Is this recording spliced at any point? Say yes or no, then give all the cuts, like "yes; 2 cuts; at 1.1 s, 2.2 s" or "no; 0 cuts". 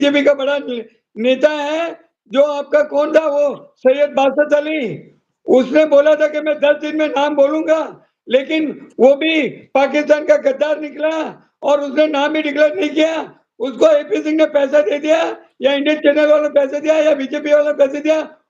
no; 0 cuts